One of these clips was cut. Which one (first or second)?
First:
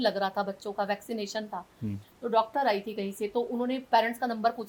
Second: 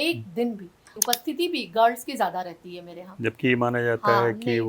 second